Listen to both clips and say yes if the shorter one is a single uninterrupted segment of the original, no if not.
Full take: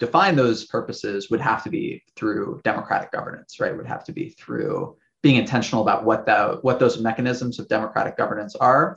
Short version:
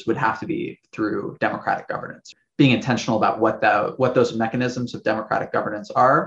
no